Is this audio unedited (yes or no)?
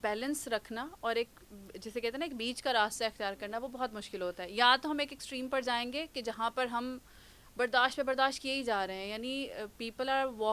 yes